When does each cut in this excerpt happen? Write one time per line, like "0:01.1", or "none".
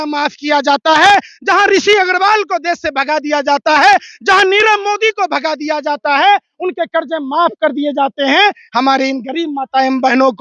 none